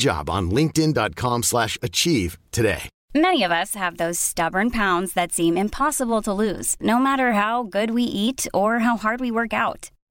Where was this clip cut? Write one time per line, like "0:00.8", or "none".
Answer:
0:02.9

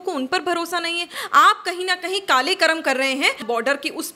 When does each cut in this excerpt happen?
0:01.2
0:03.4

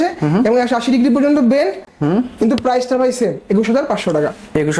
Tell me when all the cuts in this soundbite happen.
none

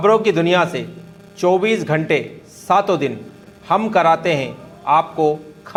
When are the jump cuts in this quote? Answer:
none

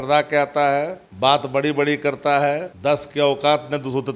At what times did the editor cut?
0:01.0
0:02.7

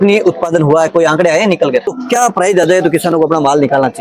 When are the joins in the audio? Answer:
0:01.9

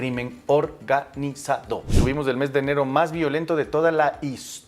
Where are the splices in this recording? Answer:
0:01.9

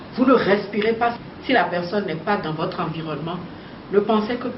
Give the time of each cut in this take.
0:01.2

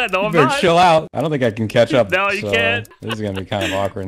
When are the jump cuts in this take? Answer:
0:01.1
0:03.0

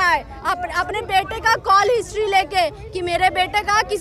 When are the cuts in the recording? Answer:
none

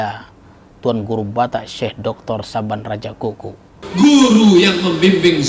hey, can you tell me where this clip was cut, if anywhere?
0:03.8

